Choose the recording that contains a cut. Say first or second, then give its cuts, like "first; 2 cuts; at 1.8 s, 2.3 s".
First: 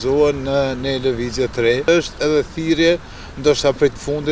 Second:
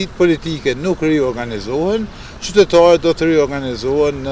first; 1 cut; at 1.9 s